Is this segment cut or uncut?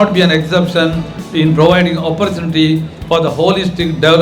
uncut